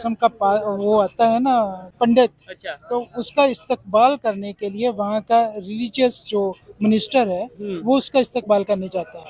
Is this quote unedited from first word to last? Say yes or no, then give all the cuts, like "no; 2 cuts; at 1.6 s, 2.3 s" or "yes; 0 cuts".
yes; 0 cuts